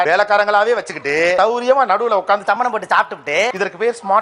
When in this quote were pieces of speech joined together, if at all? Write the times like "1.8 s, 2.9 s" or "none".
none

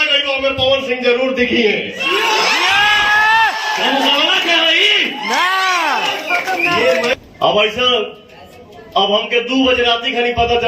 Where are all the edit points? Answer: 7.1 s

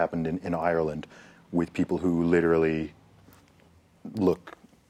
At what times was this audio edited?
none

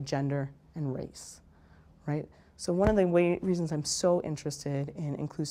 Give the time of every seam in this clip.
none

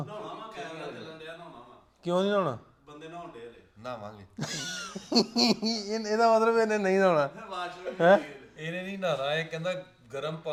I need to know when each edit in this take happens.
none

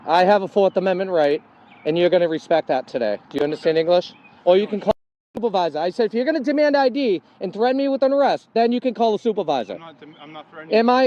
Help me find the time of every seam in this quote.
5.4 s

